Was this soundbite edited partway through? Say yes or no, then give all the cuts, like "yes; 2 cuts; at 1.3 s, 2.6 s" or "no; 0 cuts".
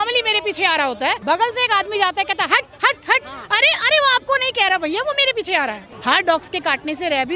yes; 2 cuts; at 1.2 s, 5.9 s